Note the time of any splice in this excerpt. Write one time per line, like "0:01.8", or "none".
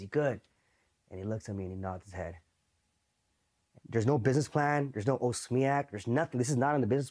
0:03.7